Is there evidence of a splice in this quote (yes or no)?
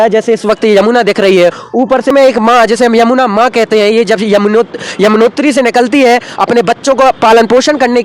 yes